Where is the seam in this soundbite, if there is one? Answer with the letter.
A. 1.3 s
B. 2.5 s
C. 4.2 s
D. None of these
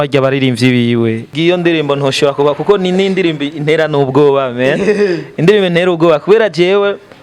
A